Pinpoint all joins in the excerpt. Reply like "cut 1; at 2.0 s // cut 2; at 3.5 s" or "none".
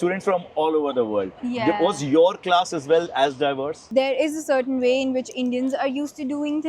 cut 1; at 3.8 s